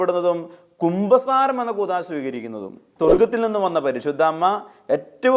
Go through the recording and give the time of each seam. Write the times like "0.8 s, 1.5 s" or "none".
2.8 s